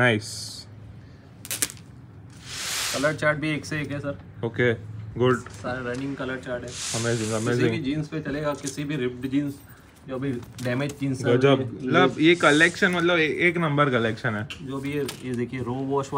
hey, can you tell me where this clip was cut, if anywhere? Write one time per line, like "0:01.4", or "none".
none